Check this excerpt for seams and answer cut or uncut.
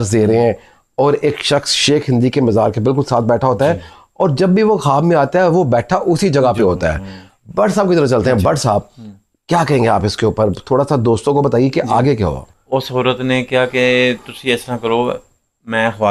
uncut